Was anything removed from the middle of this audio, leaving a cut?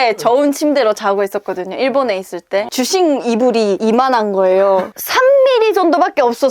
yes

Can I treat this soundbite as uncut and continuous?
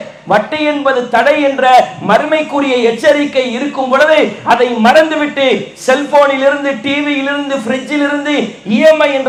yes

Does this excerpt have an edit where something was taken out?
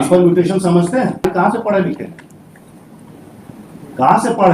yes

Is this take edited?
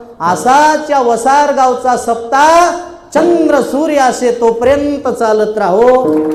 no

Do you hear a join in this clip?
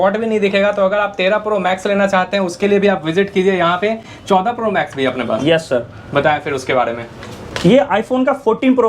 no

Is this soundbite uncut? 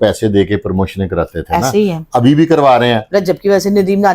no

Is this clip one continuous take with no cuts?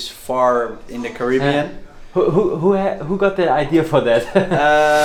yes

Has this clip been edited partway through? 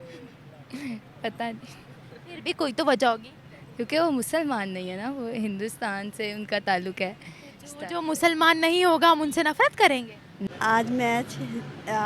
yes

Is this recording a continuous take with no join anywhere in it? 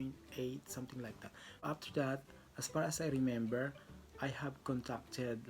no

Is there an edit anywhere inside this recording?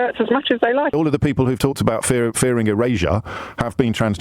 yes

